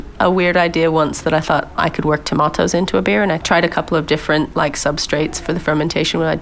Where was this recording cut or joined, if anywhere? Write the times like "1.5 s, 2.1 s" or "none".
1.7 s, 3.4 s

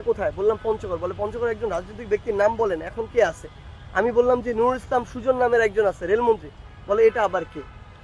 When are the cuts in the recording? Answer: none

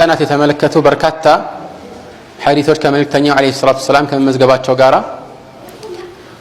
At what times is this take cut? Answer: none

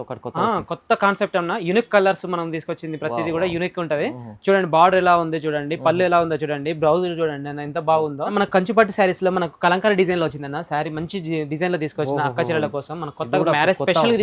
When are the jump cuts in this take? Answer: 8.3 s

